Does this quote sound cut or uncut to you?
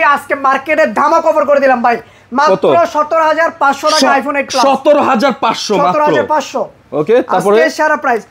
uncut